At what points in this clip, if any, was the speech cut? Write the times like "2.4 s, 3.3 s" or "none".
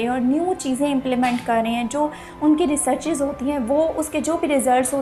none

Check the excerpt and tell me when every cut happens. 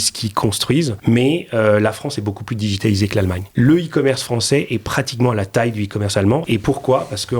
1.0 s, 3.4 s, 6.4 s

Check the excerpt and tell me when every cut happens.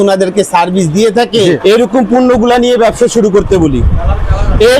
1.6 s

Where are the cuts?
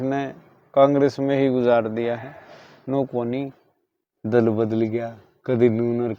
none

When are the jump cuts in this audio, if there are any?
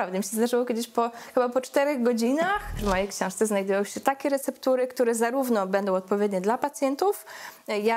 2.8 s

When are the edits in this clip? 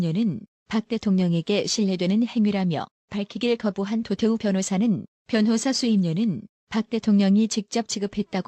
1.0 s

